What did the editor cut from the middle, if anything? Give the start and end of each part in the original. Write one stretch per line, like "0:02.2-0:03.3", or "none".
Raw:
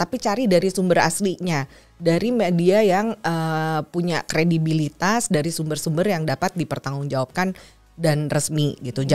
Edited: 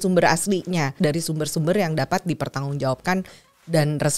0:01.7-0:05.3